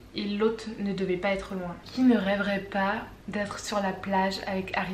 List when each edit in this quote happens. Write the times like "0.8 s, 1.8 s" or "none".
1.7 s